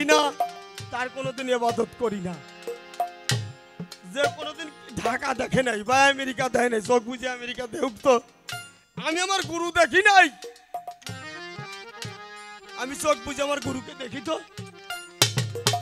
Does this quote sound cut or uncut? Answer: uncut